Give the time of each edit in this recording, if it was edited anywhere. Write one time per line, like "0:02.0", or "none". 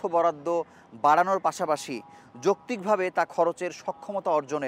none